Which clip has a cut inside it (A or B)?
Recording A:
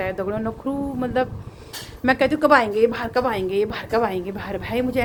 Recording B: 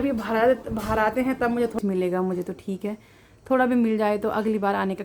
B